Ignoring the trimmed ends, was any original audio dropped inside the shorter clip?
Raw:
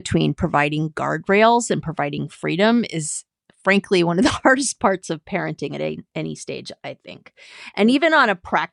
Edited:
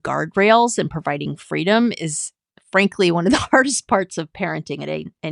no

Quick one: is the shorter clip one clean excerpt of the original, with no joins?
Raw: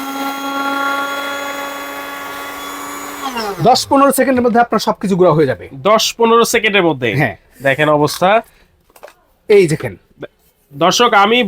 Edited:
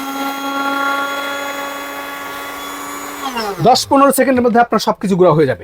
yes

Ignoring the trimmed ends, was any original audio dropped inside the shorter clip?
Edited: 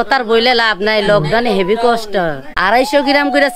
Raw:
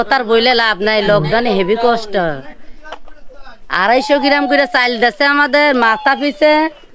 yes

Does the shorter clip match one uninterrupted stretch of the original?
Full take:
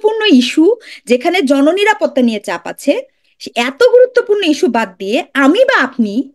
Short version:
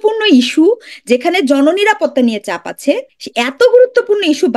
no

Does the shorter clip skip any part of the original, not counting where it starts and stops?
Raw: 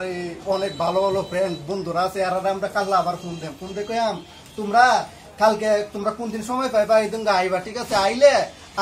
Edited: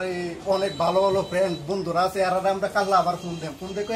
no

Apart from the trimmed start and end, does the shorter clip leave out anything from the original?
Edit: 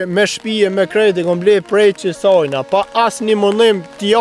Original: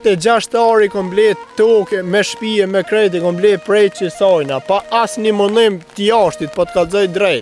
no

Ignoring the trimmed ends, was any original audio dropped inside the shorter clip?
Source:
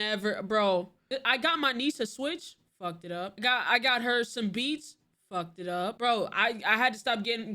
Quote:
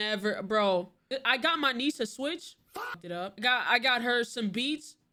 no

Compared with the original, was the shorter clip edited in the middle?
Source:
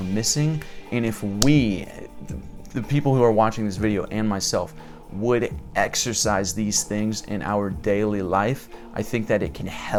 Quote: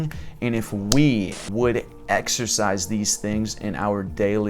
yes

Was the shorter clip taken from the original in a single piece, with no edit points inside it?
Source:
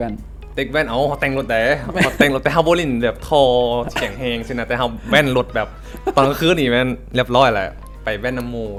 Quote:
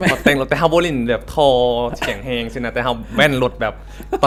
yes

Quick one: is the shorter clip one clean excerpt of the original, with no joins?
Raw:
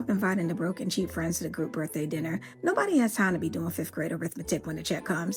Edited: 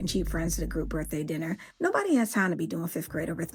yes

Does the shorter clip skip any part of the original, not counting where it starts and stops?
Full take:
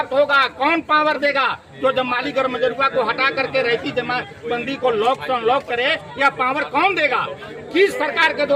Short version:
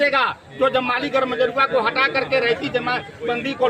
no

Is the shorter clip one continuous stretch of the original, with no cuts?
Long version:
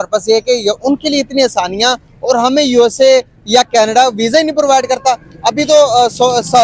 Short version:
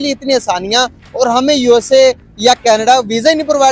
yes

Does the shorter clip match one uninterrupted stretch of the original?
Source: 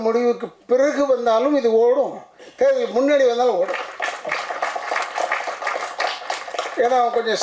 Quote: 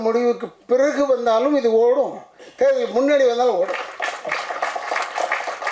yes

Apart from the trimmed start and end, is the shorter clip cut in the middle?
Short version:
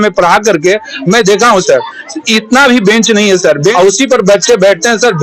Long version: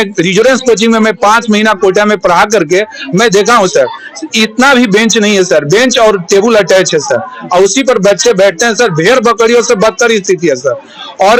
yes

